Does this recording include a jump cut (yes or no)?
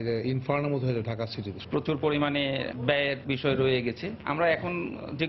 yes